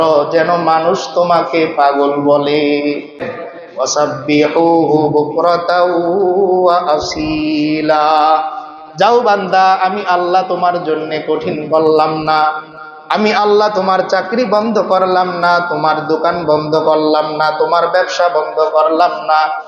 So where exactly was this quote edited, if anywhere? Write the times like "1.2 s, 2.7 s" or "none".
3.3 s